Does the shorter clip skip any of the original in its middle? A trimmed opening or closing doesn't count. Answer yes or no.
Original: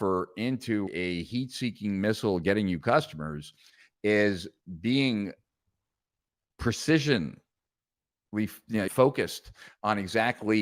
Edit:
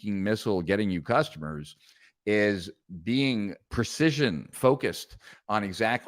yes